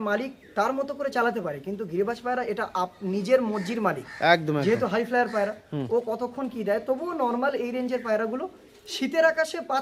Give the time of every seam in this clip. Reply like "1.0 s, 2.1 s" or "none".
none